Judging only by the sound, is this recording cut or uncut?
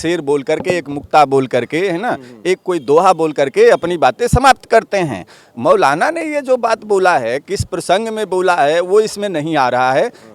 uncut